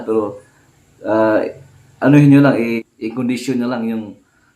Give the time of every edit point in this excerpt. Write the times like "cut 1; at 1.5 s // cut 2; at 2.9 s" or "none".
cut 1; at 2.7 s